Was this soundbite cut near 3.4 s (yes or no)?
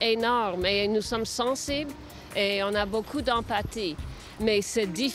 no